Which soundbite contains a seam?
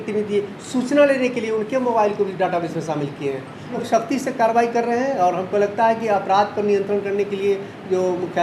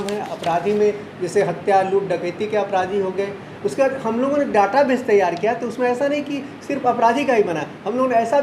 first; 1 cut; at 3.7 s

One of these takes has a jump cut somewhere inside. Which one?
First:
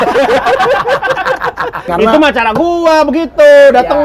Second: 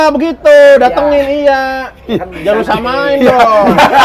first; 1 cut; at 1.9 s

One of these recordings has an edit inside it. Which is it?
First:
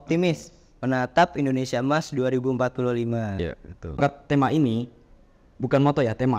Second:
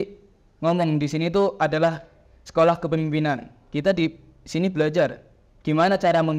first; 1 cut; at 4.0 s

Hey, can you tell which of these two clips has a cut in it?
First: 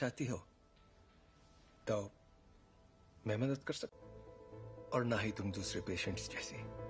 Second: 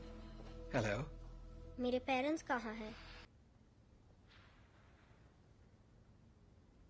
second; 1 cut; at 3.3 s

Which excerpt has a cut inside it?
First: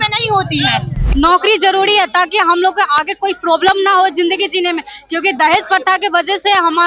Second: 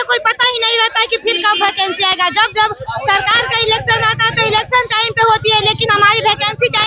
first; 1 cut; at 1.0 s

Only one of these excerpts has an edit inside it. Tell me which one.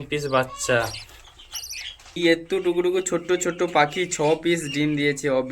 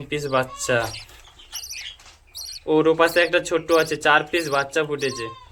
first; 1 cut; at 2.2 s

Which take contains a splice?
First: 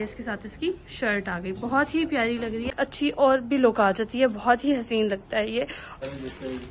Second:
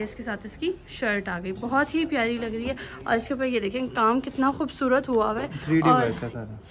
first; 2 cuts; at 2.8 s, 6.0 s

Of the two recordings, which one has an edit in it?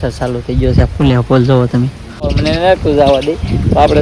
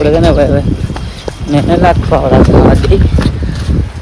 first; 1 cut; at 2.4 s

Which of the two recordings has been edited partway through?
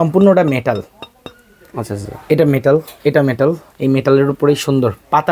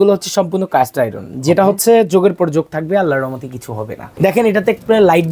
second; 1 cut; at 4.2 s

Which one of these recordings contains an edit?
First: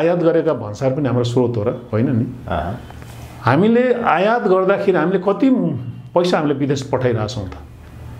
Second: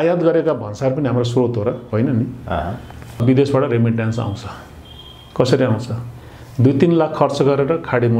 second; 1 cut; at 3.2 s

